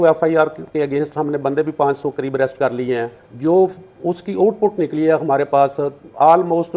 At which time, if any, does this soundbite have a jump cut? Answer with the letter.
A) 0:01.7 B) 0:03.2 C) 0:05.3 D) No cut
B